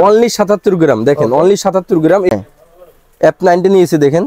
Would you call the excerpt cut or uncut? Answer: cut